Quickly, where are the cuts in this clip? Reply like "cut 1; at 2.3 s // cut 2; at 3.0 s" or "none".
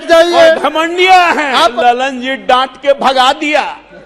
cut 1; at 1.8 s